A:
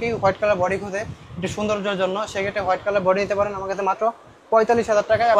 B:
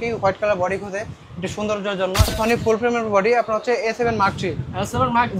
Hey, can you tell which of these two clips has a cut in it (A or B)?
B